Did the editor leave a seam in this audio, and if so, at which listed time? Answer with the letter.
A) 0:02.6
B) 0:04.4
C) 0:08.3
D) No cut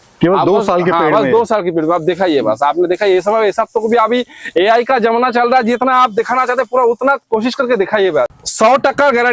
C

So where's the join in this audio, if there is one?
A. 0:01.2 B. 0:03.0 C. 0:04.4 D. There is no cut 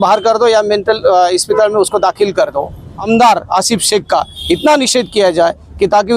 B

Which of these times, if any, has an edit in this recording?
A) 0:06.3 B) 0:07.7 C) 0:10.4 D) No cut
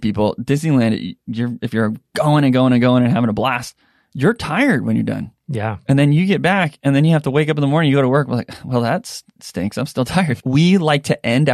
C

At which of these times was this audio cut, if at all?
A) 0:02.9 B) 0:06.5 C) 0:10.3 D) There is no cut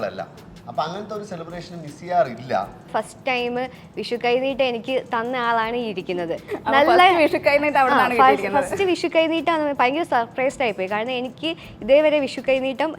A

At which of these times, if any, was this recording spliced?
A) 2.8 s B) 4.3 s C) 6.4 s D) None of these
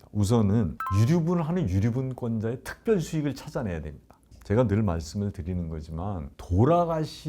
B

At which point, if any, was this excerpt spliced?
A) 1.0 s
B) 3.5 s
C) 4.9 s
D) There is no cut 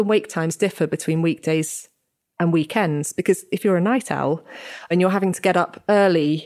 C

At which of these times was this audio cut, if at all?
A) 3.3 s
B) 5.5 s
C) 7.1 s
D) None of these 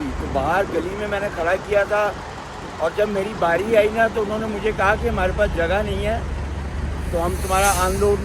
D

